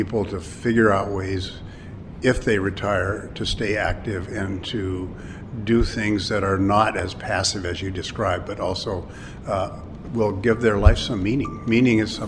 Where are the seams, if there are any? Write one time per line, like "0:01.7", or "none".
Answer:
none